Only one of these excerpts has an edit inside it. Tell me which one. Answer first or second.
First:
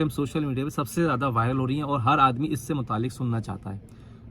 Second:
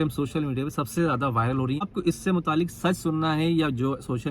second